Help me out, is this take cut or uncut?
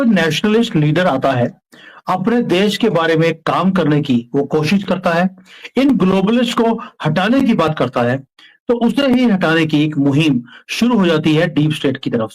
uncut